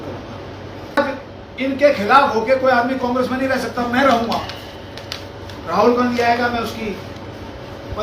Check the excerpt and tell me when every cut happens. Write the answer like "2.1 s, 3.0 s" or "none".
1.0 s